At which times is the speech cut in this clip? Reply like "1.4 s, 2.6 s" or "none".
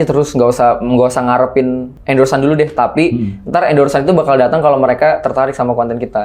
1.9 s